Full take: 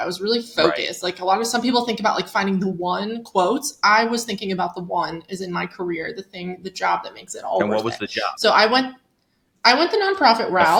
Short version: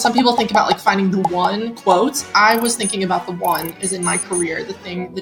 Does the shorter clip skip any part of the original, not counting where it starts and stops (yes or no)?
no